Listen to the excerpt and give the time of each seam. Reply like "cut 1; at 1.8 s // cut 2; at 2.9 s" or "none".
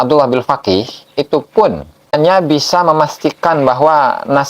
cut 1; at 2.2 s